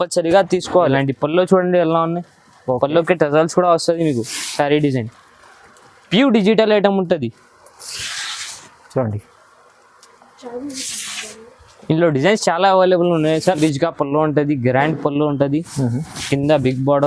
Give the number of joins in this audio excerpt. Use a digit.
2